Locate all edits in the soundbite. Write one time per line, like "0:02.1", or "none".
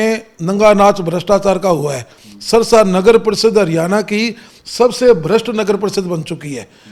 none